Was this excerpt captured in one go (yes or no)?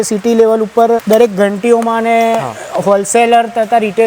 no